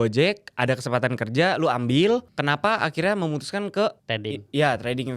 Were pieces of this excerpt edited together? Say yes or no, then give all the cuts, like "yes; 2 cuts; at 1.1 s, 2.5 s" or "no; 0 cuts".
yes; 2 cuts; at 2.3 s, 4.1 s